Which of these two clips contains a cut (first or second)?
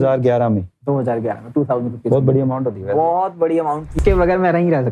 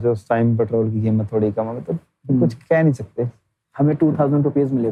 first